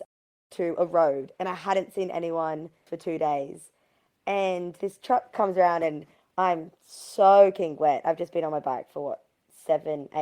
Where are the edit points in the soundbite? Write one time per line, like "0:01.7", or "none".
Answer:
0:02.9
0:04.7